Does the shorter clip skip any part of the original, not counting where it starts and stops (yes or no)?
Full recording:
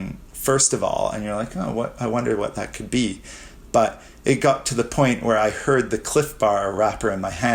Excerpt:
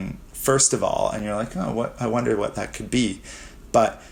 no